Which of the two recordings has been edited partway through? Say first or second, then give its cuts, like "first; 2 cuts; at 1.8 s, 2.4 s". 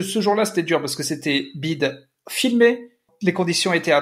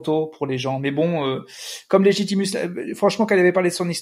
first; 1 cut; at 3.1 s